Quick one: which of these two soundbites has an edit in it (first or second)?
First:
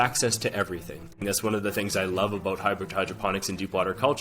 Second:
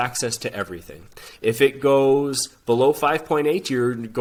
first